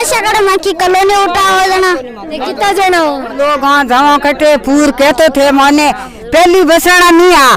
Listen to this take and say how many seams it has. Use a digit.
1